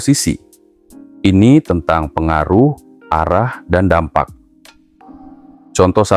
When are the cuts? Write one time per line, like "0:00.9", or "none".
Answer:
0:04.9